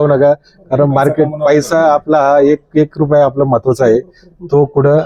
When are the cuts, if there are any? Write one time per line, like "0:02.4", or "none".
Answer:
none